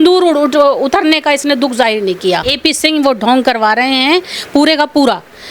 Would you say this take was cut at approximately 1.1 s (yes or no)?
no